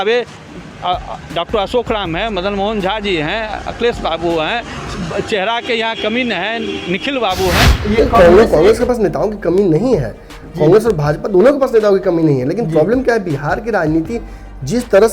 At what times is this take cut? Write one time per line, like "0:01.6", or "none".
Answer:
0:07.7